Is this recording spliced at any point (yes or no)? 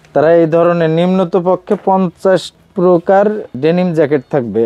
yes